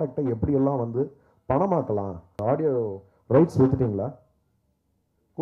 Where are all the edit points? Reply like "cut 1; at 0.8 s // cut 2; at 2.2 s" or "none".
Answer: cut 1; at 2.3 s